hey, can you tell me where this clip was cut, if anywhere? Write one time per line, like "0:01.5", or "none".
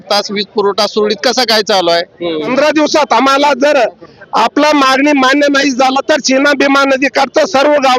0:02.5